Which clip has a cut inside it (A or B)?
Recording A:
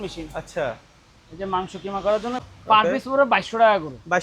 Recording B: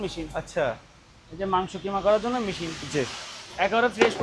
A